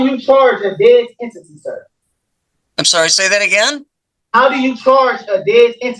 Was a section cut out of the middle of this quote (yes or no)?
no